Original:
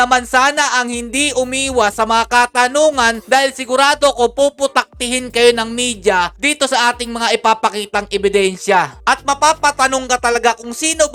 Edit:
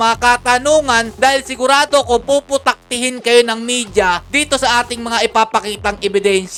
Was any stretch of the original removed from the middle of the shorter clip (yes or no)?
no